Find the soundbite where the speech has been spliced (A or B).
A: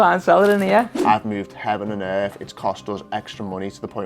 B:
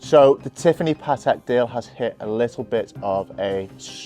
A